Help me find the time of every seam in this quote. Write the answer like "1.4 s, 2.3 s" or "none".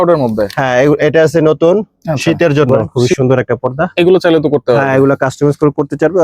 2.9 s